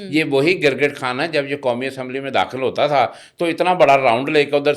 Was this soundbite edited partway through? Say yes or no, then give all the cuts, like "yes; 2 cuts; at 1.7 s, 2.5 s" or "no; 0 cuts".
no; 0 cuts